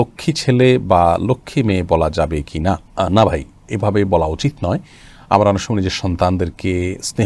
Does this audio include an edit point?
no; 0 cuts

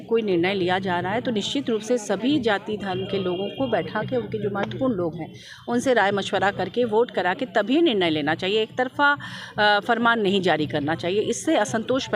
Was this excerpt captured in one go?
yes; 0 cuts

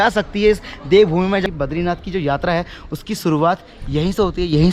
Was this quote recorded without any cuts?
no; 1 cut; at 1.4 s

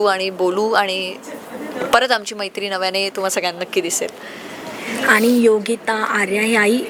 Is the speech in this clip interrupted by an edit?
no; 0 cuts

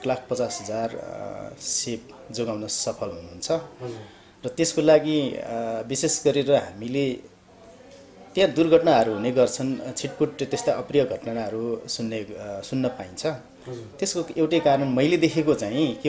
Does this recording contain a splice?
no; 0 cuts

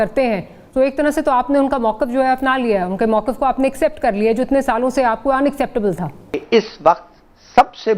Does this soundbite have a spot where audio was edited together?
yes; 1 cut; at 6.4 s

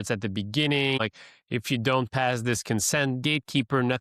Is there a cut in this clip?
yes; 1 cut; at 1.0 s

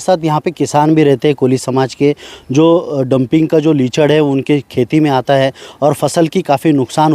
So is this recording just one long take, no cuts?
yes; 0 cuts

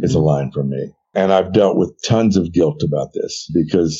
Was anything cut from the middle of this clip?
yes; 1 cut; at 0.9 s

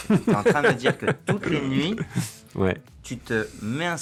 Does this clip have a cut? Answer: no; 0 cuts

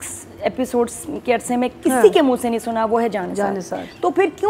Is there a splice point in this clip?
no; 0 cuts

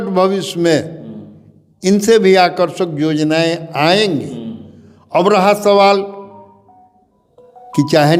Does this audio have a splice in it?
no; 0 cuts

